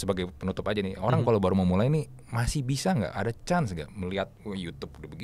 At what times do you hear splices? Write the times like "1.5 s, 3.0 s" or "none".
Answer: none